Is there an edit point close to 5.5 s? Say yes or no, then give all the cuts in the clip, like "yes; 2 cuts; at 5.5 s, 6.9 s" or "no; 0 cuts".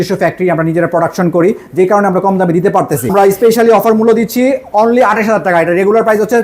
no; 1 cut; at 3.1 s